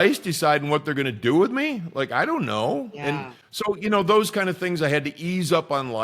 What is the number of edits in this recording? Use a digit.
1